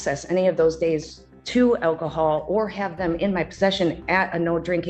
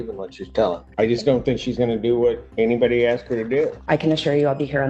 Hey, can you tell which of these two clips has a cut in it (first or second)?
second